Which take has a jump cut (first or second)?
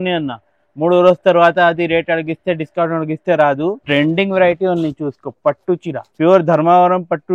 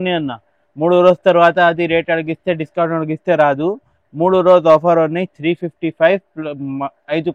first